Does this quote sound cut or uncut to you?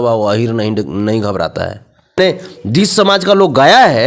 cut